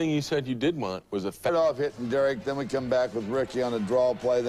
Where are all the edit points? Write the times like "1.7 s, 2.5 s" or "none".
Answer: none